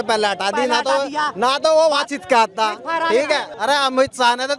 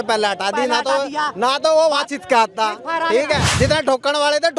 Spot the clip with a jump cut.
second; 1 cut; at 3.5 s

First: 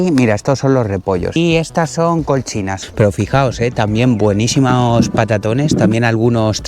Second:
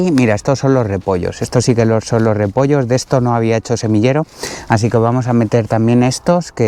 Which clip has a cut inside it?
first; 2 cuts; at 1.4 s, 2.8 s

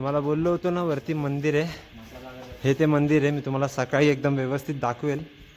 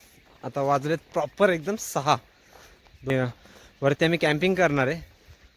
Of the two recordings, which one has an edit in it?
second; 1 cut; at 3.1 s

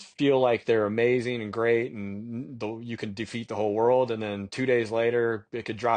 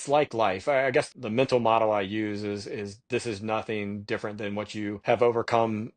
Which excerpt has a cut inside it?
second; 2 cuts; at 1.1 s, 5.0 s

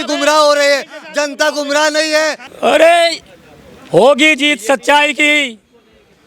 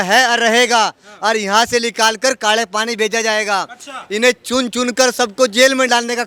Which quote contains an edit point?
first; 1 cut; at 2.5 s

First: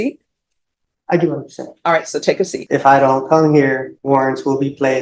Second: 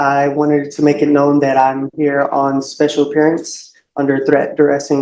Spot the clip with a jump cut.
first; 2 cuts; at 2.6 s, 3.9 s

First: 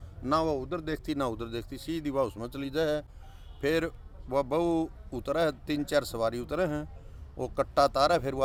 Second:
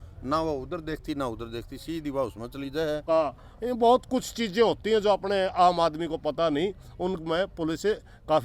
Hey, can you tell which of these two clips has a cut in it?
second; 1 cut; at 3.0 s

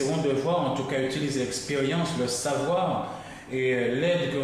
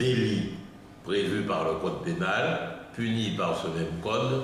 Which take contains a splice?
second; 1 cut; at 1.7 s

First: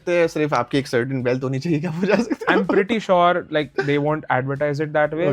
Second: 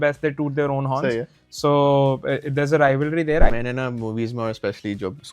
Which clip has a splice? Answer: second; 1 cut; at 3.5 s

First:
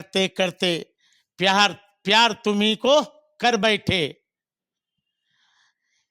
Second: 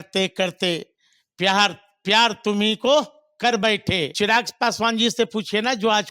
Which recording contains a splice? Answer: second; 1 cut; at 4.1 s

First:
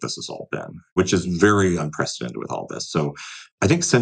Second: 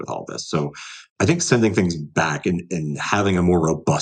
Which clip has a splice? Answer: first; 1 cut; at 0.9 s

